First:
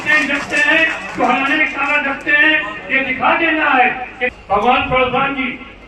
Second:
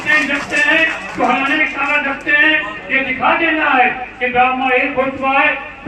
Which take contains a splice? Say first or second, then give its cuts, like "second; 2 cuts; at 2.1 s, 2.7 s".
first; 1 cut; at 4.2 s